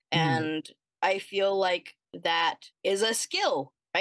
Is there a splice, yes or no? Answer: yes